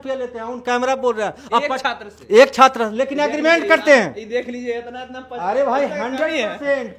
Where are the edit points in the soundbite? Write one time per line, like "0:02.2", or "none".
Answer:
none